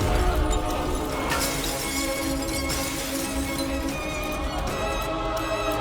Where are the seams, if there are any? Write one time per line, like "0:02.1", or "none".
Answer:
0:01.2
0:04.3